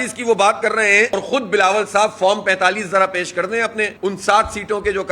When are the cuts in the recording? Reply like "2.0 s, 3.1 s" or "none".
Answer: 1.1 s